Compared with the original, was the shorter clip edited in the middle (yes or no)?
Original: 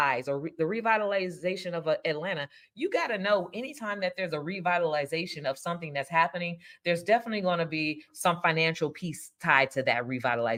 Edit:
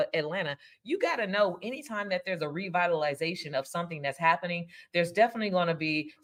no